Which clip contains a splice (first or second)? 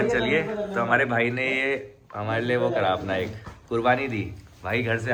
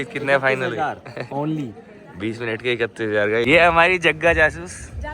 second